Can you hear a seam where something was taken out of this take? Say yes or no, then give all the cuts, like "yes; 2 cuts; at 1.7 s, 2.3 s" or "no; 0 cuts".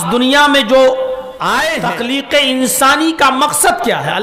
yes; 1 cut; at 1.7 s